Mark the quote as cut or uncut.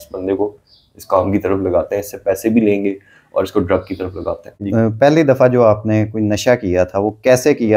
cut